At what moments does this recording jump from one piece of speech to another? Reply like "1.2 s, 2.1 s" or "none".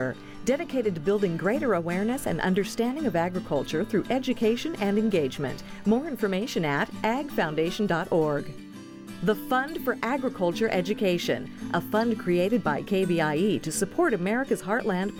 none

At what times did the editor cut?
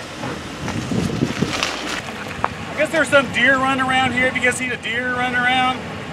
2.0 s

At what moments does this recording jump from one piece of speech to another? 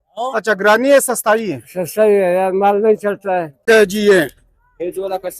3.6 s

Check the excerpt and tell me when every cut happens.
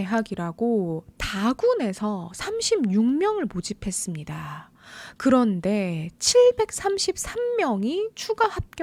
none

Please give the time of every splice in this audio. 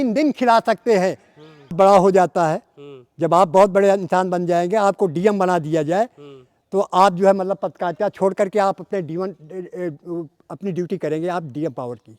1.7 s

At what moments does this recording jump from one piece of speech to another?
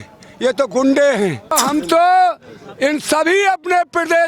1.5 s

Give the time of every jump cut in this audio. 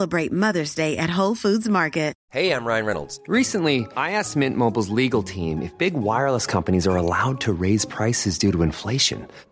2.2 s

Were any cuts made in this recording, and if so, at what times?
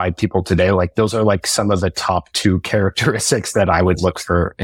none

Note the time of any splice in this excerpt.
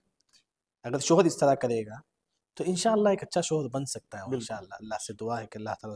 none

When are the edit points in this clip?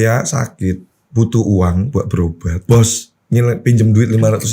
0.9 s, 2.6 s

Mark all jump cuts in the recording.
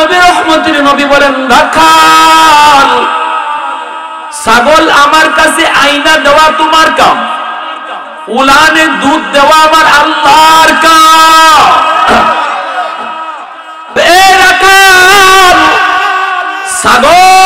13.9 s

